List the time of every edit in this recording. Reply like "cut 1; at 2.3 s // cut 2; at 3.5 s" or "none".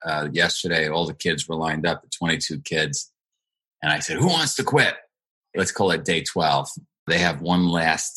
cut 1; at 5.5 s // cut 2; at 7.1 s